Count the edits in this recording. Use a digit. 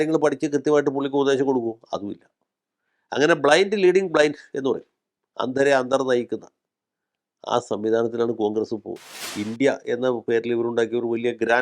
1